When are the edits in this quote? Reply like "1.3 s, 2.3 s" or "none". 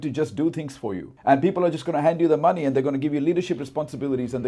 1.1 s